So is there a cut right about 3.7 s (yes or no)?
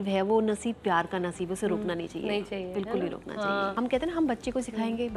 yes